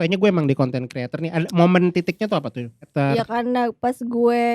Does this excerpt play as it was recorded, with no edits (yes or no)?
no